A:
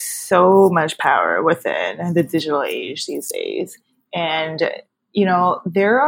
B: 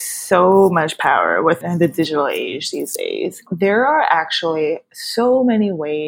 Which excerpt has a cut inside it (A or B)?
B